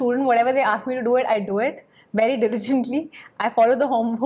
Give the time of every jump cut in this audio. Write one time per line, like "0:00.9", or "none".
none

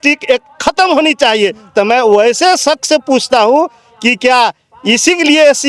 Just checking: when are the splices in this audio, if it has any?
none

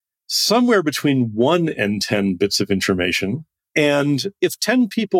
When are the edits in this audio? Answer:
0:03.5

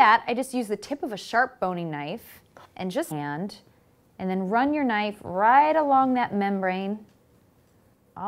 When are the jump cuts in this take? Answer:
none

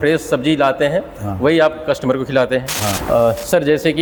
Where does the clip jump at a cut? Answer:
none

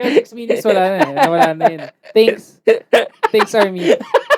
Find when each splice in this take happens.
none

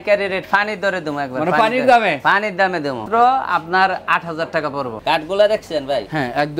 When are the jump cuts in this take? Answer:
0:03.0
0:04.9

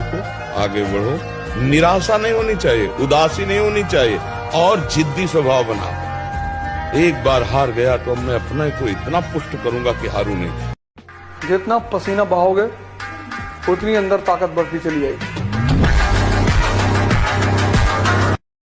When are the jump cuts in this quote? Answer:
0:10.9

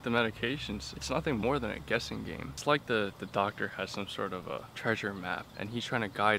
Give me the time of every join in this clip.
0:00.9
0:02.5
0:04.7
0:05.5

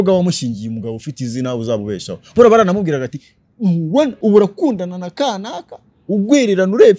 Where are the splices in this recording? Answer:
0:04.2

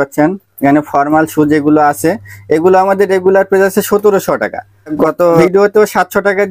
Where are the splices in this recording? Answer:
none

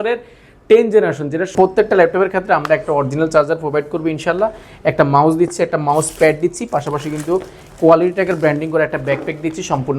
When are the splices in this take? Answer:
0:01.5

